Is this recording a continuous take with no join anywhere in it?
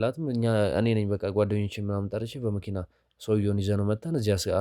yes; 0 cuts

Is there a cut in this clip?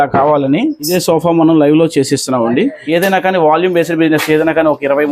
yes; 2 cuts; at 0.9 s, 2.8 s

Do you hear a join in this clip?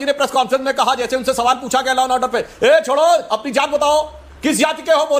no; 0 cuts

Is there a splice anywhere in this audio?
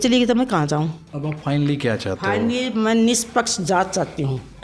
yes; 1 cut; at 1.1 s

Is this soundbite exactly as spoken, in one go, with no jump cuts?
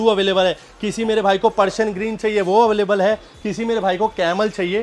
yes; 0 cuts

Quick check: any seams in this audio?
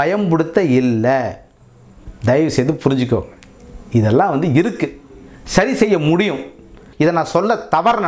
yes; 1 cut; at 6.8 s

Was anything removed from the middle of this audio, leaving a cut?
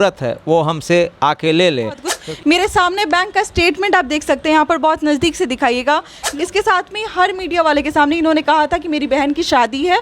yes; 2 cuts; at 2.1 s, 6.2 s

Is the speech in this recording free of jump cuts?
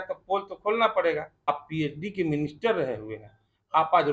no; 1 cut; at 1.5 s

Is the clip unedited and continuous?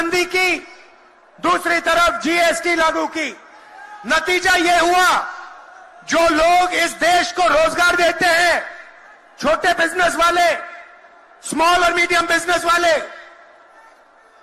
yes; 0 cuts

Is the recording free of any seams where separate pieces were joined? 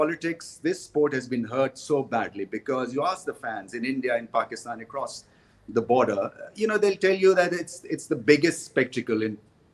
yes; 0 cuts

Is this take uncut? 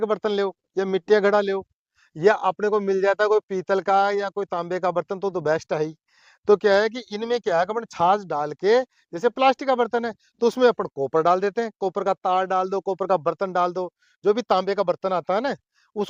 yes; 0 cuts

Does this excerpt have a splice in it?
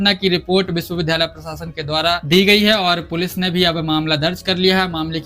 yes; 1 cut; at 2.3 s

